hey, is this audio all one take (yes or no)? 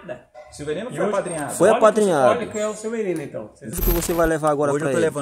no